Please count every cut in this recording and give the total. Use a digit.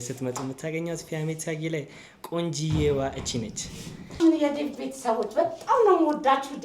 1